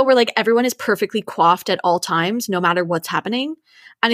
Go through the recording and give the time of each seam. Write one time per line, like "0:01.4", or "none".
none